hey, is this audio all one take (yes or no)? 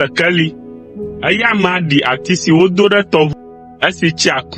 no